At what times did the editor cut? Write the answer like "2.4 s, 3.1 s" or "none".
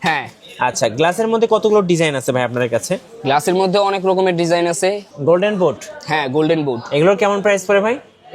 5.0 s